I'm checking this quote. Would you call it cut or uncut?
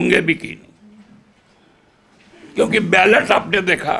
uncut